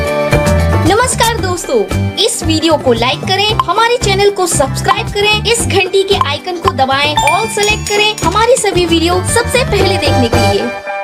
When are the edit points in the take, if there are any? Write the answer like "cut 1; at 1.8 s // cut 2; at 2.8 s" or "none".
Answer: none